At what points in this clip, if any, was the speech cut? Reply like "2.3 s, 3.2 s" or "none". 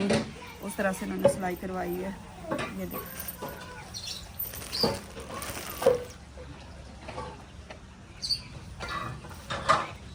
none